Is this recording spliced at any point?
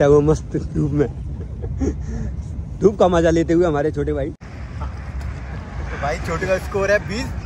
yes; 1 cut; at 4.4 s

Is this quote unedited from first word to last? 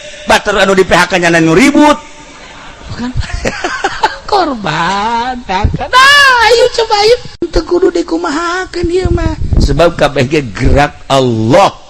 no; 1 cut; at 7.5 s

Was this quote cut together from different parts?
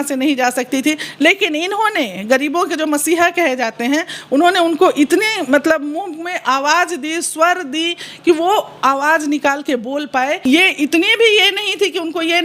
yes; 1 cut; at 10.4 s

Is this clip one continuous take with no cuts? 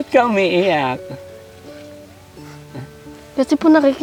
yes; 0 cuts

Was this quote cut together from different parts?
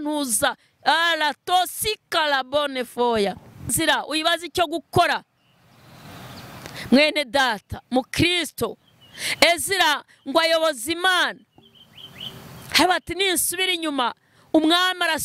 yes; 1 cut; at 3.7 s

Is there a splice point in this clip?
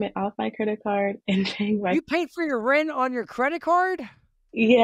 no; 0 cuts

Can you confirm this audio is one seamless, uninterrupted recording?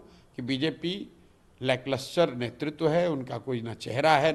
yes; 0 cuts

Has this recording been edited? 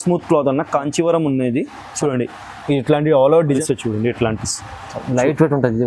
yes; 1 cut; at 3.6 s

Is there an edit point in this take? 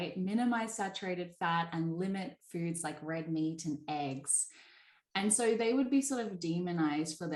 no; 0 cuts

